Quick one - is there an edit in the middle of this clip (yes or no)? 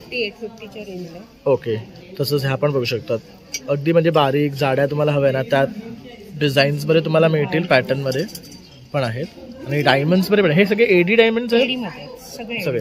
no